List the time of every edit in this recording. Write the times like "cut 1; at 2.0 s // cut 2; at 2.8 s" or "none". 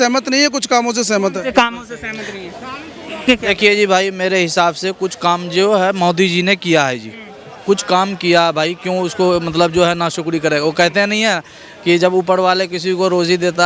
cut 1; at 3.2 s